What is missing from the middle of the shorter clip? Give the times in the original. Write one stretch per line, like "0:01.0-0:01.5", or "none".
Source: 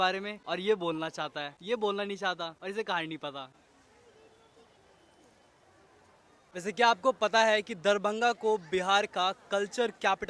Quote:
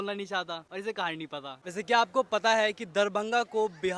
0:03.5-0:06.5